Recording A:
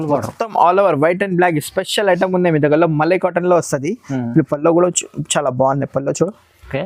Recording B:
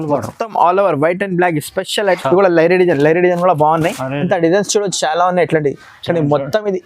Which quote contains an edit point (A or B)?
B